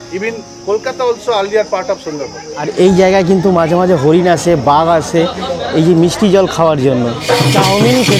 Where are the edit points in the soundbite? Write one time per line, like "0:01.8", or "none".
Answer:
0:02.5
0:07.2